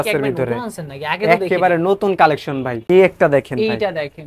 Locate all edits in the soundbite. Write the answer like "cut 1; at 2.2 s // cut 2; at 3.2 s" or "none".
cut 1; at 2.9 s